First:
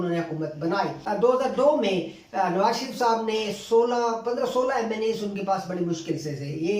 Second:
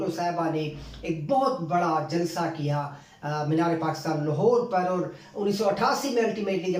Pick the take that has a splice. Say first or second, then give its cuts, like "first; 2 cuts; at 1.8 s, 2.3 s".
first; 1 cut; at 1.0 s